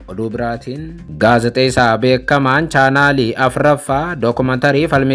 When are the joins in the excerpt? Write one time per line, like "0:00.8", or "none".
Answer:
0:01.0